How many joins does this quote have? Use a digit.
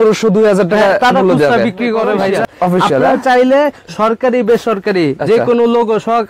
1